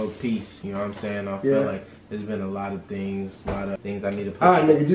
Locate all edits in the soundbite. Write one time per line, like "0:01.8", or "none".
0:03.8